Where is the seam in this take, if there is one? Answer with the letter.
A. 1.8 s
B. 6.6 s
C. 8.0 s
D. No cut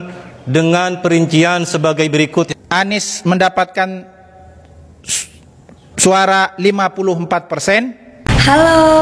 C